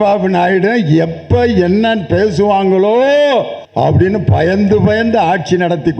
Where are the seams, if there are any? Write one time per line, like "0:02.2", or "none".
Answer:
0:03.6